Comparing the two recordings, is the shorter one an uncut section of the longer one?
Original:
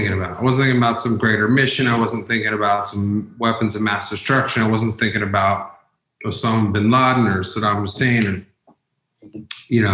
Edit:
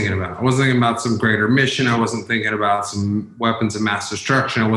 yes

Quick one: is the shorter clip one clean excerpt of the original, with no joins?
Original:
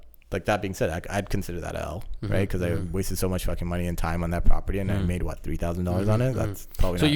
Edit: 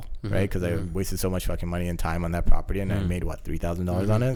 yes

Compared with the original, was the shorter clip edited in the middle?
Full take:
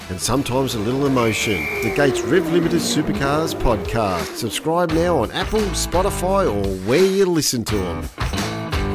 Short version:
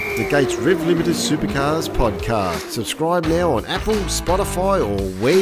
no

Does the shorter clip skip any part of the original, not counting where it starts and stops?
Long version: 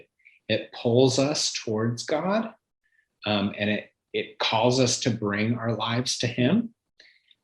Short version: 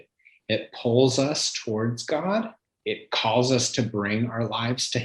yes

